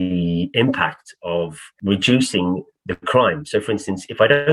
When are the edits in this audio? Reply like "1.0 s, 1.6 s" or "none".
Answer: 1.7 s, 2.7 s